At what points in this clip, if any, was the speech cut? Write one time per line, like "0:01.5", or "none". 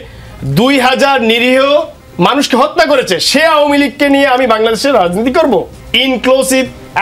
0:05.8